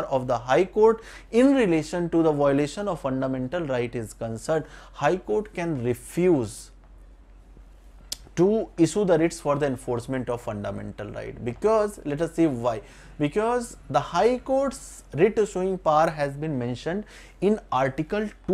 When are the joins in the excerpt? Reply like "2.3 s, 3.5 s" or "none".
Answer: none